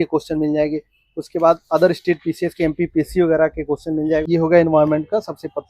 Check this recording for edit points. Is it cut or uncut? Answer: cut